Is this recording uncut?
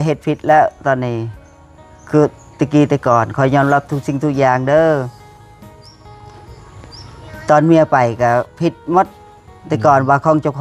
yes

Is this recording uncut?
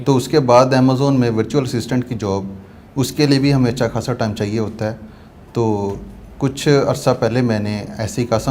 yes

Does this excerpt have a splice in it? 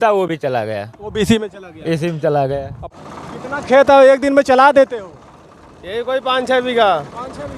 yes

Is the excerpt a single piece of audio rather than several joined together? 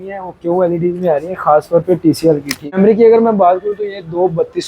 no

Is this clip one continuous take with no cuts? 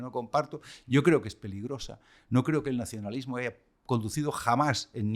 yes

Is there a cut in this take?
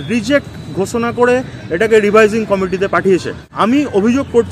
yes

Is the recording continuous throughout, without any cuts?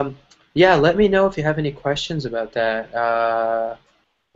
yes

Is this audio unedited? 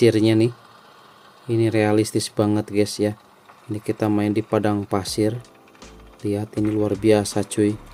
yes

